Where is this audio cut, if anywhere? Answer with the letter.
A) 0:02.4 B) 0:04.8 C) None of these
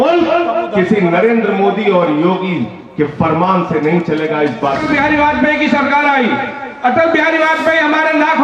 B